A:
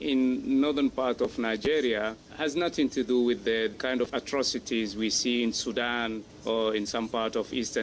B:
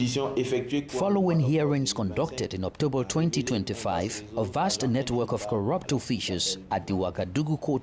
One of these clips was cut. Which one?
A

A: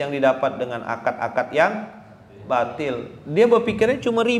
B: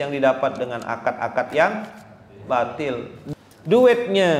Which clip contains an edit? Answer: B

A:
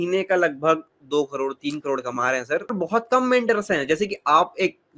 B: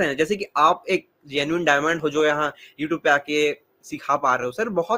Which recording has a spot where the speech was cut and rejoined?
A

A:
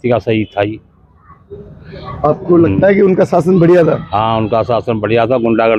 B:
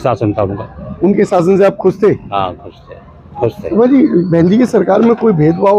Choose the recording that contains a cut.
B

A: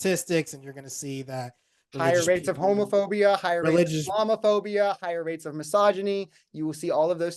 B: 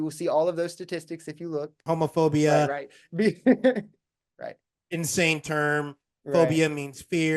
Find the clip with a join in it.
B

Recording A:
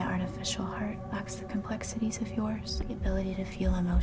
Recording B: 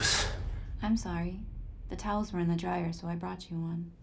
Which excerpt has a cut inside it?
A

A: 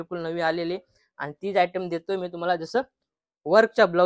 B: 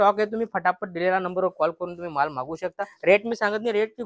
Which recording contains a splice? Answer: B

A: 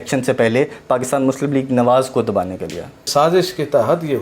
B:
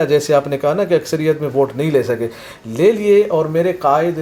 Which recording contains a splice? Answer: A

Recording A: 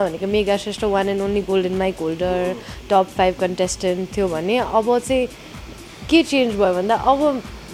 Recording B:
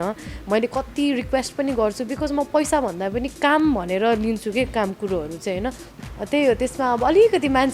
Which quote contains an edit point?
B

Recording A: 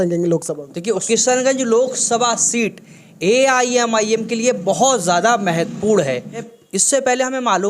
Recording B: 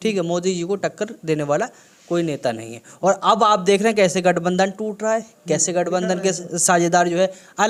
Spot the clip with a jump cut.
A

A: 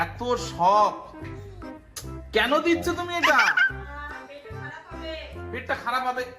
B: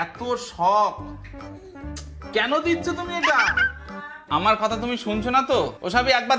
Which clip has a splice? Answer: B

